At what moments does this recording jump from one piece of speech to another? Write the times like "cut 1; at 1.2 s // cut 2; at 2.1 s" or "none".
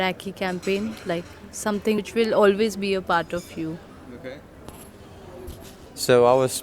none